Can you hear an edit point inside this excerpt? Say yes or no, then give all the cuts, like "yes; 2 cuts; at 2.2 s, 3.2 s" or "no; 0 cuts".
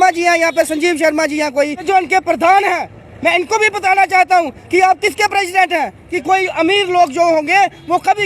yes; 2 cuts; at 1.8 s, 6.1 s